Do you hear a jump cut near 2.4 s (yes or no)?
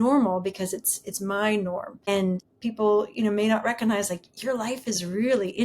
yes